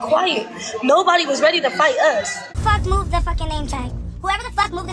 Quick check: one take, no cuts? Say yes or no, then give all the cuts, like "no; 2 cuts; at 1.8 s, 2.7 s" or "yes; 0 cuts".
no; 1 cut; at 2.6 s